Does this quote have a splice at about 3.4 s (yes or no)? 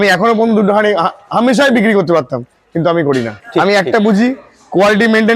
yes